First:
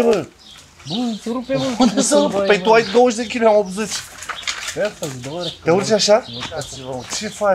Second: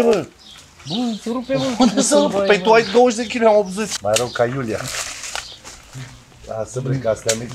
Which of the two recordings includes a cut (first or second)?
second